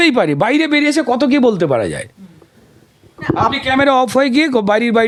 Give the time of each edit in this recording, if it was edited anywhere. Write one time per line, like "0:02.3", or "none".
none